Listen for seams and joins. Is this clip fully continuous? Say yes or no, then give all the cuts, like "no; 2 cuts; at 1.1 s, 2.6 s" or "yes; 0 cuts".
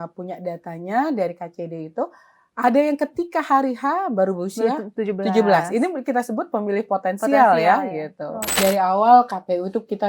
no; 1 cut; at 8.6 s